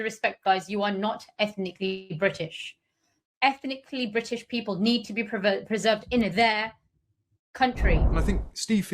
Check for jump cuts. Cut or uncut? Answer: cut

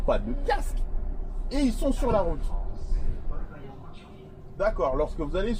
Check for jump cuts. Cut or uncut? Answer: uncut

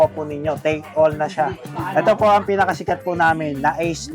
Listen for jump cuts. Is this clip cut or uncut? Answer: cut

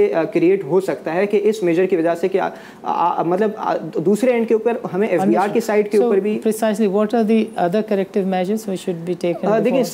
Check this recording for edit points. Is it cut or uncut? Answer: uncut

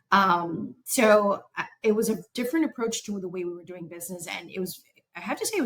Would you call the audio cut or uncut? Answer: uncut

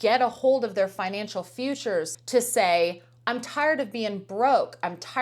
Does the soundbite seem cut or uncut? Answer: cut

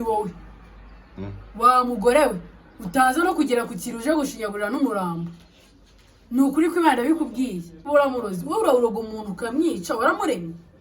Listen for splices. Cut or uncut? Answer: cut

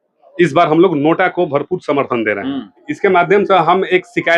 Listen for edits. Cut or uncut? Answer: cut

